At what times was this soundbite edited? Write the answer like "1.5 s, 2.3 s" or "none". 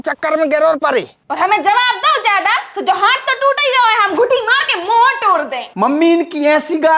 1.2 s, 5.6 s